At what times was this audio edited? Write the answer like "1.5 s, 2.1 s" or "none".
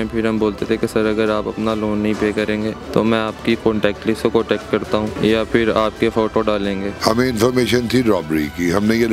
2.8 s, 5.1 s, 6.9 s